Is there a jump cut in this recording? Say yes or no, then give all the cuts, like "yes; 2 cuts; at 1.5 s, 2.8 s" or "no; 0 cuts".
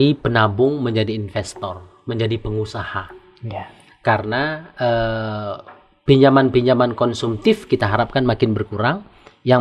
no; 0 cuts